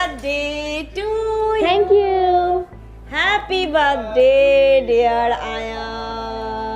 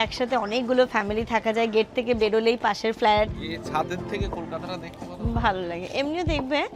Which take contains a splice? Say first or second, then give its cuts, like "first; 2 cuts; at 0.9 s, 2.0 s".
second; 1 cut; at 3.5 s